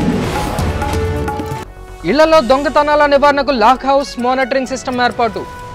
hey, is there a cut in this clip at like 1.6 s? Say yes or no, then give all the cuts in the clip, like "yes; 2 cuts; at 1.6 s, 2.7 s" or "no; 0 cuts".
yes; 1 cut; at 1.6 s